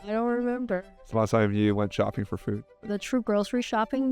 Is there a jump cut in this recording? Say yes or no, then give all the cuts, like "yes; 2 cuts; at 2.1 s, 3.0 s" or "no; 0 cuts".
yes; 1 cut; at 2.7 s